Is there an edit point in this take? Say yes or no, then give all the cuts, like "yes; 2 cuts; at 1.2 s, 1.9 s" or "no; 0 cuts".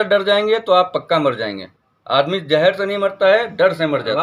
no; 0 cuts